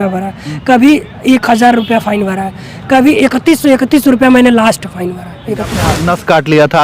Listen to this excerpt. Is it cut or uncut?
cut